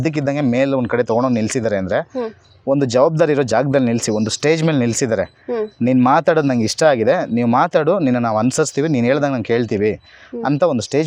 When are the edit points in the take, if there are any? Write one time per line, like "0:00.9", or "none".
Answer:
none